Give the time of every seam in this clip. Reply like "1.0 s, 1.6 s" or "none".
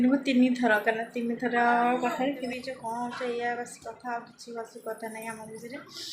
2.5 s